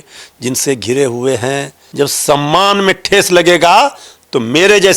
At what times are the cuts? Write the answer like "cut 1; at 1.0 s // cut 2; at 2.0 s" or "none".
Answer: cut 1; at 1.8 s

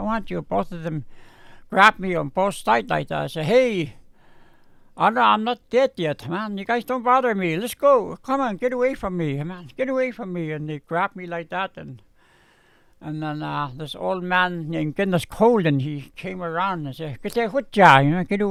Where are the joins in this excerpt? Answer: none

